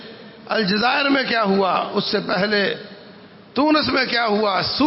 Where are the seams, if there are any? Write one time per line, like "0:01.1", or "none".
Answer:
none